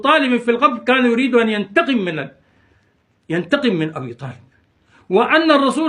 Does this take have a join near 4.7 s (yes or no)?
yes